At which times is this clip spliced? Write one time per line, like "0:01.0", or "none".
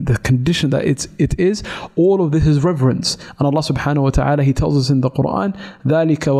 none

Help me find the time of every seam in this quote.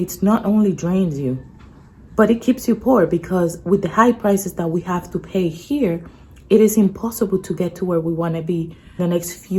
none

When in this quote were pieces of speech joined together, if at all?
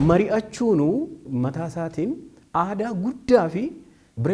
0:01.2

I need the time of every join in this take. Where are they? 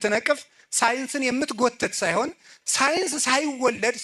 none

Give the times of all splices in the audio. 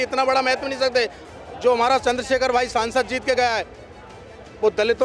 0:01.2

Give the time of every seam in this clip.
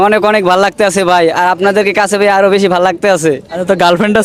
none

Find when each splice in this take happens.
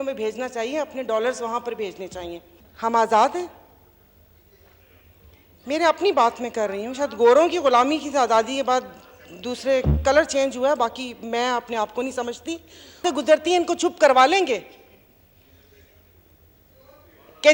0:02.6
0:13.0

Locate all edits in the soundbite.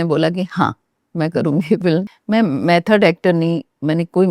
0:02.1

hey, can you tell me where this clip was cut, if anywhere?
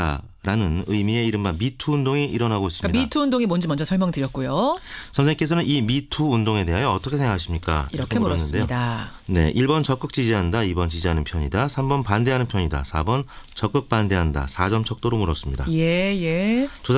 0:06.8

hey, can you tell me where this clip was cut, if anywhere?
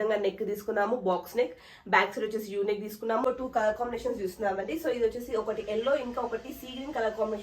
0:03.2

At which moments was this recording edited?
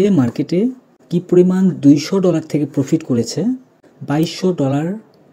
0:00.9
0:04.2

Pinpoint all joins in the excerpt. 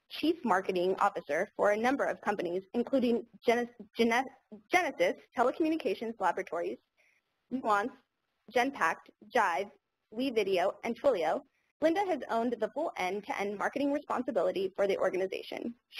none

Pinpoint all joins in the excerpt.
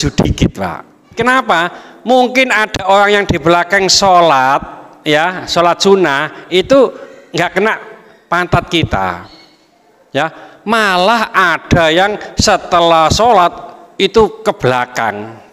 0:01.1

